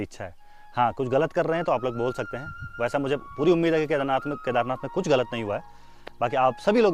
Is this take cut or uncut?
uncut